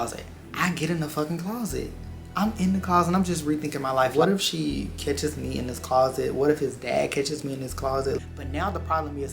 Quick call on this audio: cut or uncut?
cut